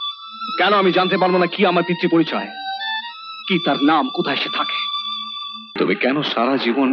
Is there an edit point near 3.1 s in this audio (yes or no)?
no